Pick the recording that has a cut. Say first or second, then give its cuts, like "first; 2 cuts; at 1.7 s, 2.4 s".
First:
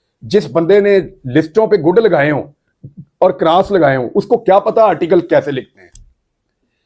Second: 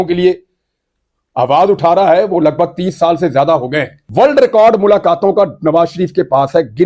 second; 1 cut; at 4.0 s